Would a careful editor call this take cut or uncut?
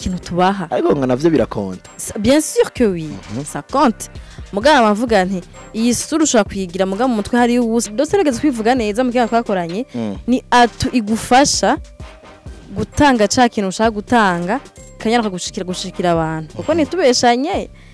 cut